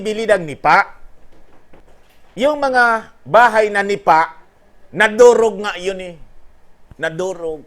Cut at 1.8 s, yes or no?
yes